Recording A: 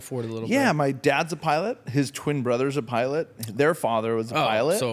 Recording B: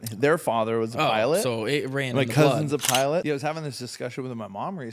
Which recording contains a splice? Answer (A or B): B